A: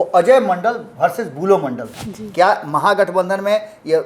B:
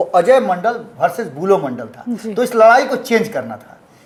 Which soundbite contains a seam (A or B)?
A